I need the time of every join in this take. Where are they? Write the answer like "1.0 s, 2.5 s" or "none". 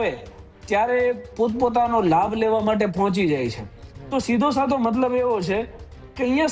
none

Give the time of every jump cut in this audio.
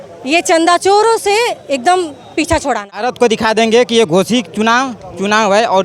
3.0 s

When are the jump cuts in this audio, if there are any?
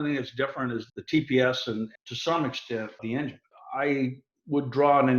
0.9 s, 2.0 s, 3.0 s

